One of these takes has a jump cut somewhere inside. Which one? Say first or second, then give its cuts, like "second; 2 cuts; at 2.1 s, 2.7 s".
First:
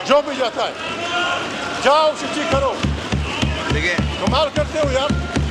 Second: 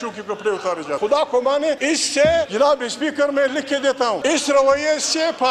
second; 4 cuts; at 1.0 s, 1.8 s, 2.5 s, 4.2 s